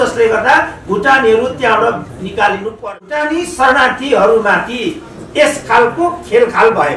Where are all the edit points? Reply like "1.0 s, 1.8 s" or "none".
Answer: 3.0 s